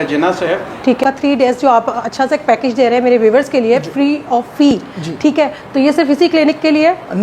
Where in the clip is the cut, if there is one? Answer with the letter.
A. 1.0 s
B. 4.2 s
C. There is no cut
A